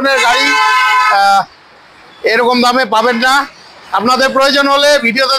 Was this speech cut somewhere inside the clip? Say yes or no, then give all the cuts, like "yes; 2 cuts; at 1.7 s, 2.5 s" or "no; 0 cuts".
no; 0 cuts